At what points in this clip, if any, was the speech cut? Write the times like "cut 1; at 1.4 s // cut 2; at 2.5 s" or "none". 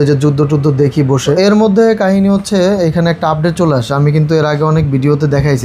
cut 1; at 1.3 s